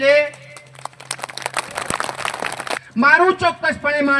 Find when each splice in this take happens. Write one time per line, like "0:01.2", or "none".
0:02.8